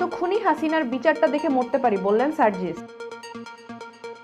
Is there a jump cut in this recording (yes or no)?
no